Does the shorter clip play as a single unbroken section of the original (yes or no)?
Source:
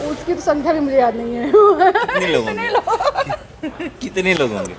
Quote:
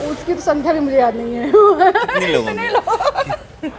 yes